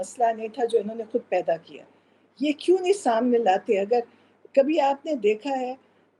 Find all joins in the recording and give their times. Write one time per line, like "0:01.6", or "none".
none